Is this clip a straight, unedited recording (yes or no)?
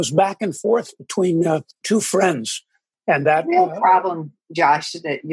no